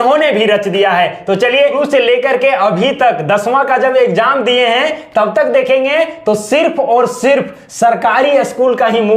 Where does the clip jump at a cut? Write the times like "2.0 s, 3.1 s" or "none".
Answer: 1.8 s